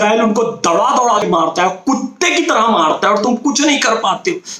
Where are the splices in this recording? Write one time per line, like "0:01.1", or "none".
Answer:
0:01.2